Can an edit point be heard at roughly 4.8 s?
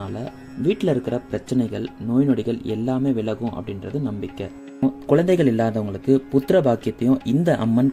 yes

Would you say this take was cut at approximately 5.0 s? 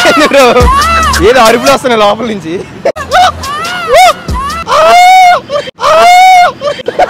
no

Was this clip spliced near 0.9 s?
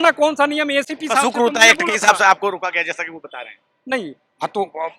no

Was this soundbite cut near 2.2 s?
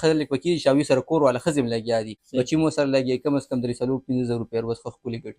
yes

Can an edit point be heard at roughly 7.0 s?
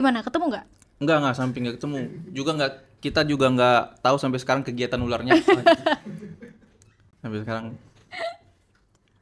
no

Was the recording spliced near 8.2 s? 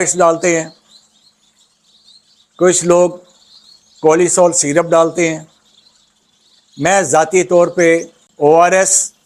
yes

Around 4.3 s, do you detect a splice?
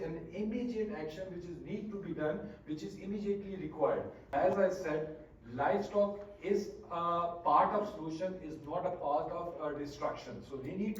yes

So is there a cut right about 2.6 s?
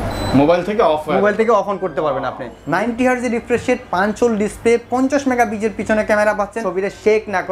yes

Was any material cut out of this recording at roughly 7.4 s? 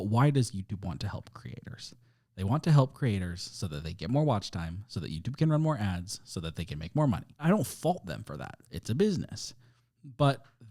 yes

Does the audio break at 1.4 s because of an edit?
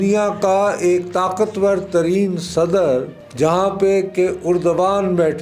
no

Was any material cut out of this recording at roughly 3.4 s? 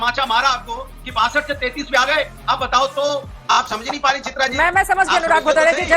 yes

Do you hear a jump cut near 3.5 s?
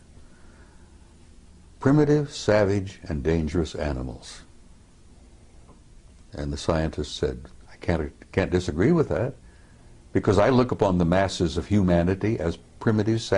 yes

